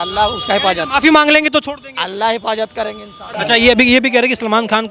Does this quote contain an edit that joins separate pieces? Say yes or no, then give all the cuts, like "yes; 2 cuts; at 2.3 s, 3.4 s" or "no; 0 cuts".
yes; 1 cut; at 3.2 s